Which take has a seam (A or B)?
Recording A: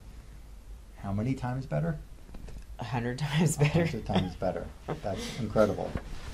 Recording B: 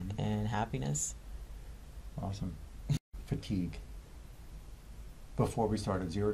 B